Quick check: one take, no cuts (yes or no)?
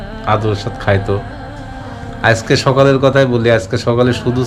yes